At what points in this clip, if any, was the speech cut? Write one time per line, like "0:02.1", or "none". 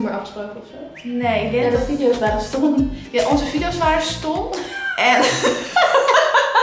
none